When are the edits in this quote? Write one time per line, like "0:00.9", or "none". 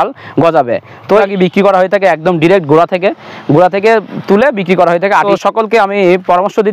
0:01.2
0:05.3